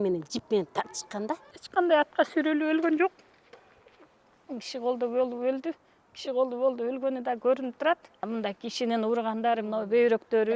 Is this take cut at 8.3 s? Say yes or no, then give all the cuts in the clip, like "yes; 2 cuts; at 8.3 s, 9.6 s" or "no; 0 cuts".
yes; 2 cuts; at 1.5 s, 8.3 s